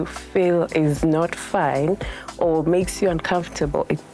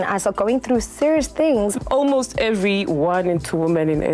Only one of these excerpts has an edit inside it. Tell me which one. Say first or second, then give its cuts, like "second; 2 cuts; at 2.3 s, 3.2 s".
second; 1 cut; at 1.7 s